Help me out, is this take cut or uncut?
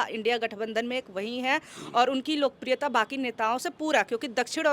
uncut